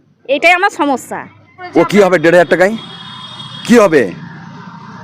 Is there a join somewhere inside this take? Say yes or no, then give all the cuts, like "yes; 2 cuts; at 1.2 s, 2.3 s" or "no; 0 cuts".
yes; 1 cut; at 1.6 s